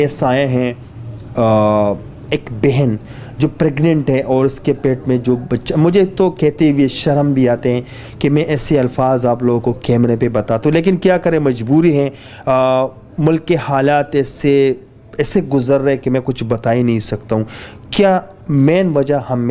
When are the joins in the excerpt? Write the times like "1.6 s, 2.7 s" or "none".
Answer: none